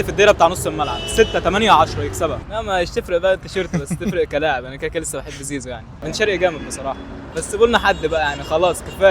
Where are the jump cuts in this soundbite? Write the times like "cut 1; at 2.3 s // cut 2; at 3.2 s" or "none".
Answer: cut 1; at 2.4 s // cut 2; at 5.9 s